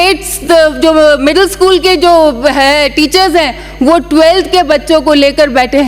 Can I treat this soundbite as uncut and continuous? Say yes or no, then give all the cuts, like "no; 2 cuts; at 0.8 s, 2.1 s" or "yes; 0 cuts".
yes; 0 cuts